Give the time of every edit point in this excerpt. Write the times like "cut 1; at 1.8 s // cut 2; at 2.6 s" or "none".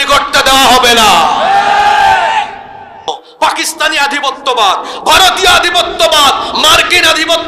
cut 1; at 3.1 s